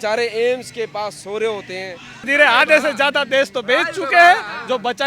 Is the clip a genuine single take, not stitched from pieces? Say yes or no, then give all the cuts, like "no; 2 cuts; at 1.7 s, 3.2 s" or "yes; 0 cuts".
no; 1 cut; at 2.3 s